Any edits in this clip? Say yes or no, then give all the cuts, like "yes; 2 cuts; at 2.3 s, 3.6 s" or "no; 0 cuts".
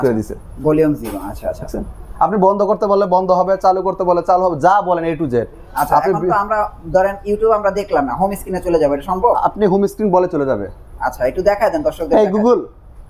no; 0 cuts